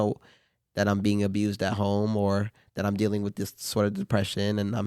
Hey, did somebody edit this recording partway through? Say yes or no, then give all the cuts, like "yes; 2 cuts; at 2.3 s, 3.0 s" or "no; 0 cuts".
no; 0 cuts